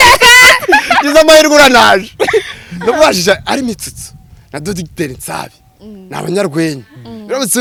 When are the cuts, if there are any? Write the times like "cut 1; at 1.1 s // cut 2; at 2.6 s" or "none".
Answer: none